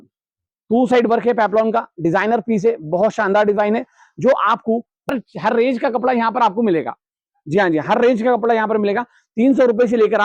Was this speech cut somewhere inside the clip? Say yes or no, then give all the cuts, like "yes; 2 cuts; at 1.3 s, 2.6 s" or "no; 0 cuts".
yes; 1 cut; at 5.1 s